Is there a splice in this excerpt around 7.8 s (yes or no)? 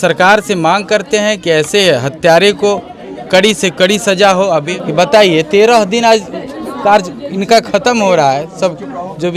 no